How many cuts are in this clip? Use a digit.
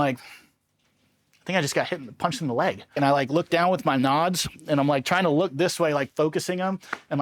1